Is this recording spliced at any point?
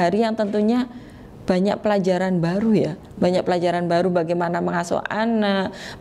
no; 0 cuts

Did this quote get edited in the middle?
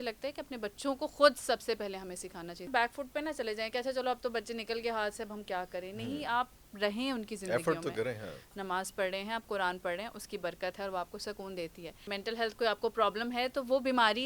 yes; 3 cuts; at 2.7 s, 8.5 s, 12.1 s

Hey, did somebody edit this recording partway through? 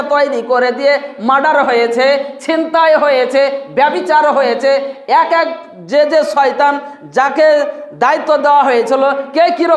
no; 0 cuts

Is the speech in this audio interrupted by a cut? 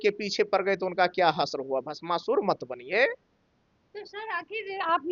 no; 0 cuts

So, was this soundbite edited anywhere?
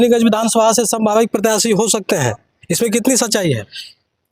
no; 0 cuts

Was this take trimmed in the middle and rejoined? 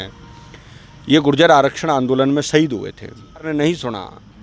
yes; 1 cut; at 3.4 s

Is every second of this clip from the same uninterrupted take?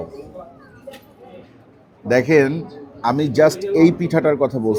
no; 1 cut; at 1.5 s

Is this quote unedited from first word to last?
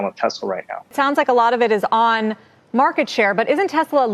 no; 1 cut; at 0.9 s

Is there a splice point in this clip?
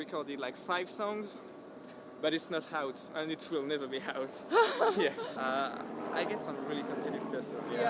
yes; 1 cut; at 5.3 s

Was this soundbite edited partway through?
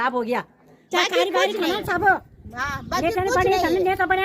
yes; 1 cut; at 0.9 s

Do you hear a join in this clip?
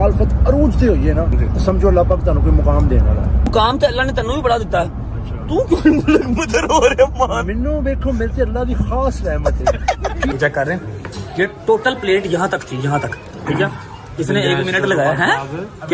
yes; 3 cuts; at 1.4 s, 3.5 s, 10.3 s

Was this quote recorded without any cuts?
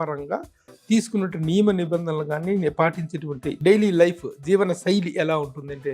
no; 1 cut; at 3.6 s

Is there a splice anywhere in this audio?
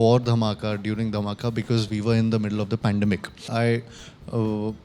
yes; 1 cut; at 3.5 s

